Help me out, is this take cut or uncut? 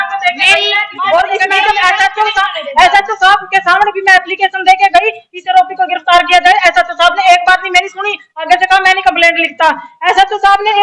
cut